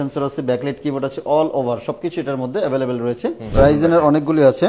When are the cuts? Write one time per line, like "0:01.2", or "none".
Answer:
0:03.4